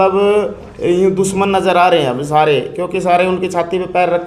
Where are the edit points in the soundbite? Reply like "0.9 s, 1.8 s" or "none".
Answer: none